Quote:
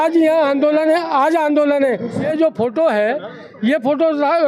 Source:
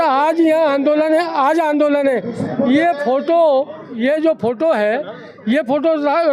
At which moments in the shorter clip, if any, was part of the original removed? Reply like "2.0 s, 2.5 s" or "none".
2.2 s